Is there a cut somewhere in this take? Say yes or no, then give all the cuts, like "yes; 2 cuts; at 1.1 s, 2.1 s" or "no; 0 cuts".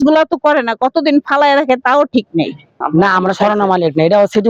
yes; 1 cut; at 2.6 s